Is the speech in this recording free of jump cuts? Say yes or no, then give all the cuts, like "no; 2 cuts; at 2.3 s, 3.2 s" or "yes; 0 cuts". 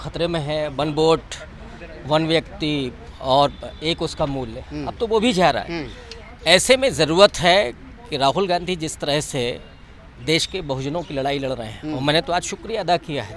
yes; 0 cuts